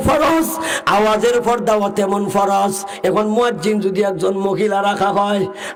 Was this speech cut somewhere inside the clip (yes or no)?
no